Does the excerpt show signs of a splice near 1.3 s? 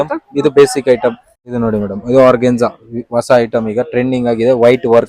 yes; 1 cut; at 1.3 s

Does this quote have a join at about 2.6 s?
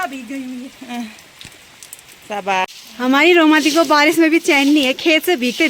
yes; 1 cut; at 2.6 s

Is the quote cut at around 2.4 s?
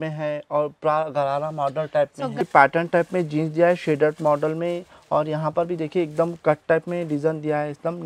yes; 1 cut; at 2.4 s

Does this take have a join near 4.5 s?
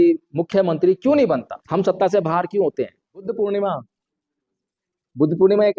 no; 2 cuts; at 1.6 s, 3.2 s

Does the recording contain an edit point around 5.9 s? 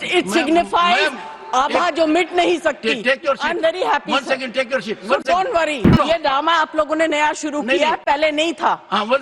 yes; 1 cut; at 5.9 s

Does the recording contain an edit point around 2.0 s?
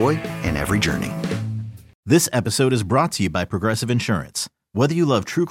yes; 1 cut; at 2.0 s

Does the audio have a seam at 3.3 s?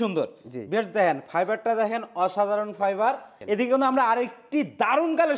yes; 1 cut; at 3.3 s

